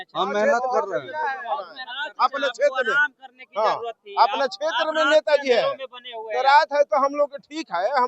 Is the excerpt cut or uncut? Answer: uncut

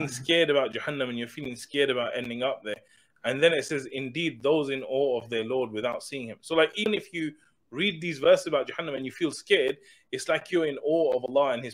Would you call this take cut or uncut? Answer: uncut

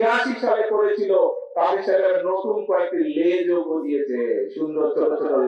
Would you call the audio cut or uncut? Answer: uncut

